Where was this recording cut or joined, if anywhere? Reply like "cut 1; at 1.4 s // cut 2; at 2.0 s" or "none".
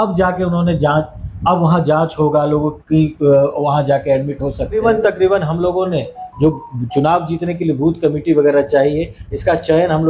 cut 1; at 4.8 s